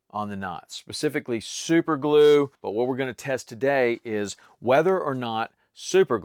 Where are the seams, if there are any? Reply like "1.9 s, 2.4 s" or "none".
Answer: 2.6 s